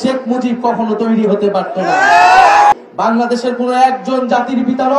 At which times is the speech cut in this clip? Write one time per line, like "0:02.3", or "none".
0:02.7